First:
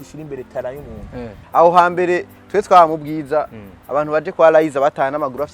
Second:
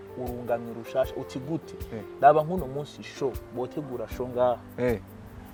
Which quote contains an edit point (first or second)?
first